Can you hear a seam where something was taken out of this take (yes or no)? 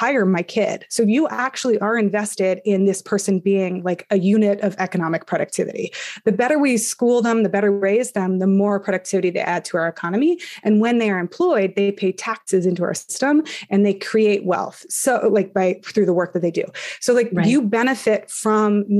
no